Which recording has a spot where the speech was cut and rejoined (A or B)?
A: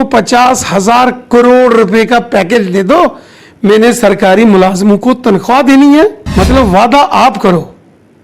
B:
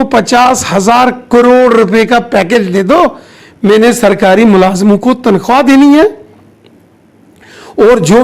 A